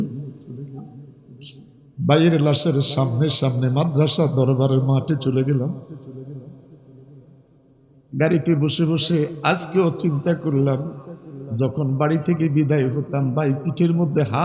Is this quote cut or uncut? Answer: uncut